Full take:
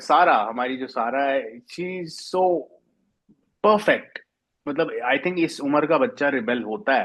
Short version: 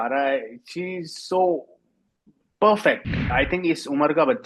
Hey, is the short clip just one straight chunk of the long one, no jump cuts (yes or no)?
no